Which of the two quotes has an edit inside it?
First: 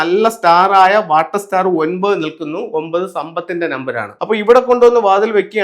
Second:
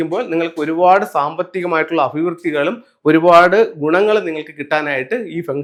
first; 1 cut; at 4.1 s

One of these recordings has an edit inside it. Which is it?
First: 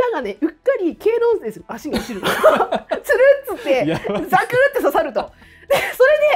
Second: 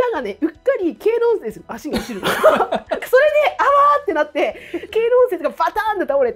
second; 2 cuts; at 3.0 s, 4.8 s

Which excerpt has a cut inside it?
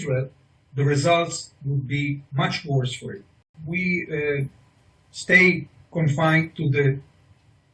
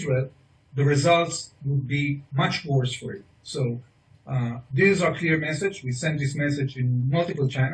first; 1 cut; at 3.5 s

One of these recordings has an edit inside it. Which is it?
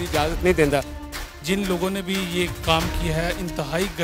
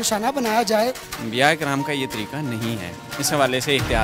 second; 1 cut; at 1.1 s

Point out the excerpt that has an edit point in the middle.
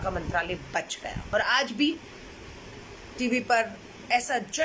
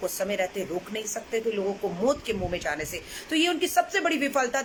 first; 1 cut; at 1.2 s

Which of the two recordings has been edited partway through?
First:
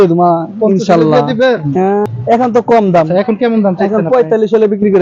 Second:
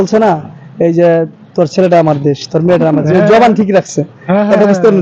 first; 1 cut; at 2.1 s

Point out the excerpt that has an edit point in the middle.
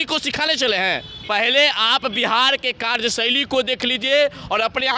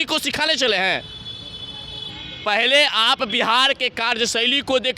first; 1 cut; at 1.1 s

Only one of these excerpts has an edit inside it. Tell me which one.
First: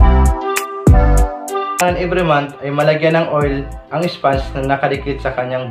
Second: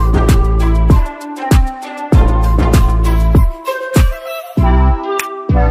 first; 1 cut; at 1.8 s

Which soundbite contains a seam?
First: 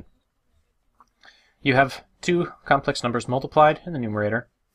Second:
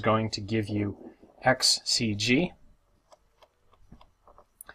second; 1 cut; at 3.1 s

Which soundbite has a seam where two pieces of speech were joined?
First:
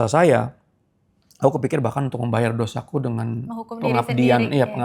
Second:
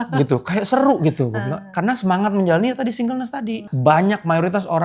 second; 1 cut; at 3.7 s

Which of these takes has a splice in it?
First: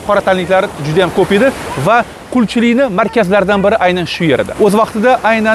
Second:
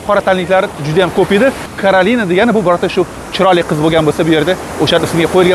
second; 1 cut; at 1.7 s

